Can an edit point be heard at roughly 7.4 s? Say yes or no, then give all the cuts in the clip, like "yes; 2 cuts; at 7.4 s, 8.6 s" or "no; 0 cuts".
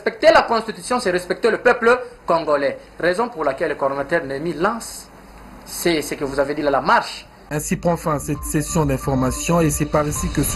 yes; 1 cut; at 7.4 s